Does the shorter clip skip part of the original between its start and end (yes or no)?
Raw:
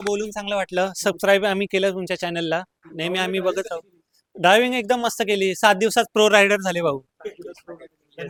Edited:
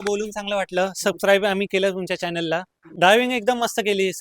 yes